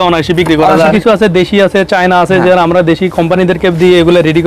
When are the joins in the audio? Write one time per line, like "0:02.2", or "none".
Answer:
0:00.9